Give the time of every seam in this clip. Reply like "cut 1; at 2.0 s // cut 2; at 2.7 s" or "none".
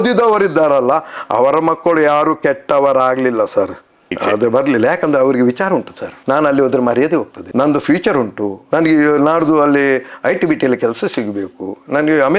none